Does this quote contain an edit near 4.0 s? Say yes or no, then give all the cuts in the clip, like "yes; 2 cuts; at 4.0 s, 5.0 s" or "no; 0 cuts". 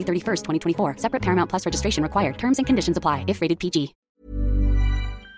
yes; 1 cut; at 4.0 s